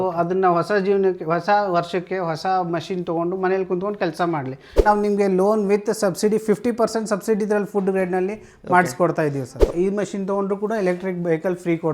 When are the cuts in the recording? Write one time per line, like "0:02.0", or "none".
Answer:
0:04.8
0:09.7